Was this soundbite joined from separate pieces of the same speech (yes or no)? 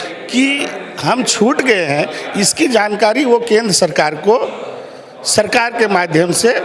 no